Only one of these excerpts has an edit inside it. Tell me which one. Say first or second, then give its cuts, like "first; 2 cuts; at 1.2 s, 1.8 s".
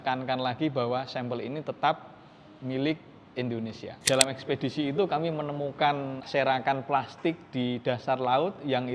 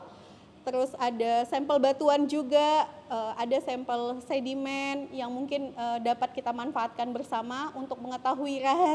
first; 2 cuts; at 4.0 s, 6.2 s